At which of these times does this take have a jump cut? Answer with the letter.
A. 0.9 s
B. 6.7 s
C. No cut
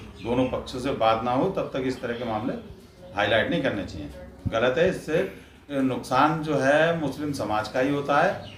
C